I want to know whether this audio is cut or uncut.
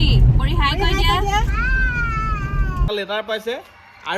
cut